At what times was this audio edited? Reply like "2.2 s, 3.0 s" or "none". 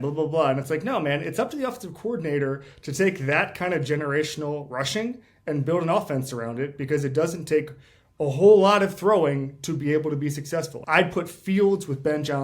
10.8 s